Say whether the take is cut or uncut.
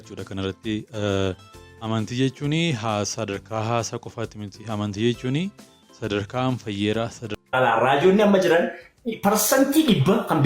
cut